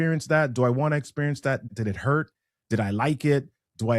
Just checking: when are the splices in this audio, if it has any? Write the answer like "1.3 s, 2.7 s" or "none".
1.7 s

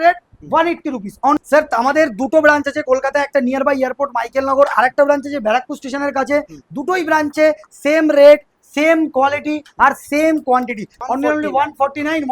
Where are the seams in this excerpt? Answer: 1.4 s, 10.9 s

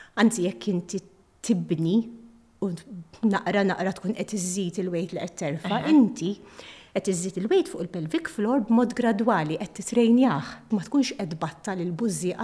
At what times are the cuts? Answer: 10.6 s

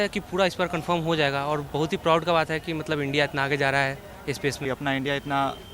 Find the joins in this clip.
4.6 s

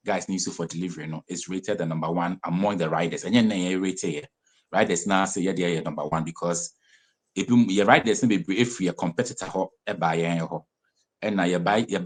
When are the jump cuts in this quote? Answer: none

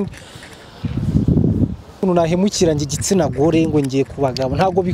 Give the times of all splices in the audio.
2.0 s

